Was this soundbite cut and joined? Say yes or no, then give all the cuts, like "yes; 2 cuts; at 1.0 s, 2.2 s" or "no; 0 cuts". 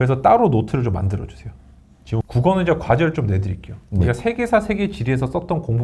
yes; 1 cut; at 2.2 s